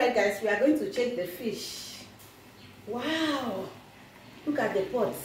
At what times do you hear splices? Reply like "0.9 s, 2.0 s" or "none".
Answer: none